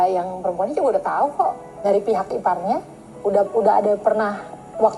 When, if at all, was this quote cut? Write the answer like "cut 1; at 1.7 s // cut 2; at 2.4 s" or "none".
cut 1; at 1.9 s